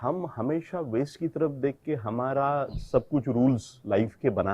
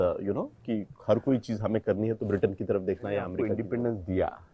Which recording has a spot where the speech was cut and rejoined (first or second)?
second